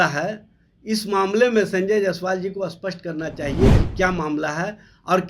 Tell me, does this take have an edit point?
no; 0 cuts

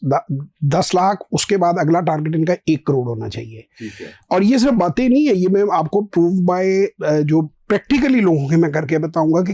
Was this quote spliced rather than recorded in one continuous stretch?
no; 0 cuts

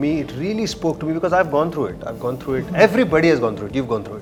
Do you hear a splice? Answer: no; 0 cuts

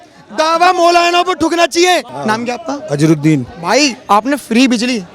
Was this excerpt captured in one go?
no; 1 cut; at 2.1 s

